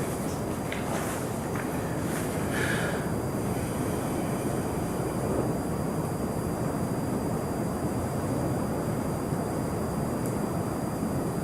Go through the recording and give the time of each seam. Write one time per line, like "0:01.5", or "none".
none